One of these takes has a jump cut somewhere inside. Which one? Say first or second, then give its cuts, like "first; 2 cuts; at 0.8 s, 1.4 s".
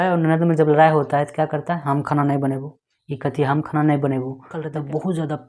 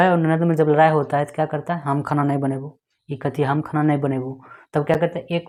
first; 1 cut; at 4.6 s